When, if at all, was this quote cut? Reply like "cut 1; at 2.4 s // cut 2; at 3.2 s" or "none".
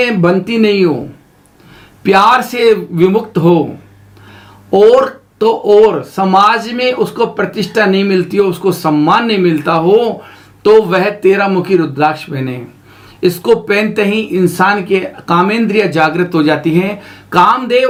none